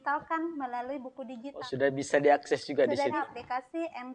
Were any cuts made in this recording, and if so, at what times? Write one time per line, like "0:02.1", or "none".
0:01.5
0:03.0